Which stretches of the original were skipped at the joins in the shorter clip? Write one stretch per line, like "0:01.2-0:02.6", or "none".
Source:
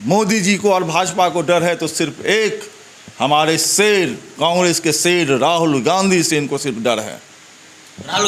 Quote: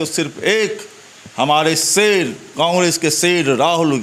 none